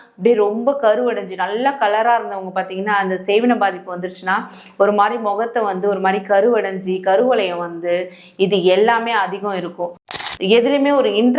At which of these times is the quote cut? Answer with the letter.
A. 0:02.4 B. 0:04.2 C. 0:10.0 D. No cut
C